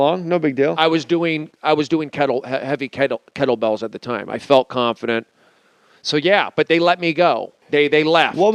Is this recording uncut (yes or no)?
yes